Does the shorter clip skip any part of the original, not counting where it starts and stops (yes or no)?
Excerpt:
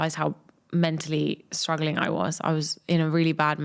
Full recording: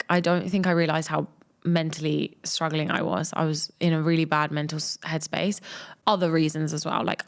no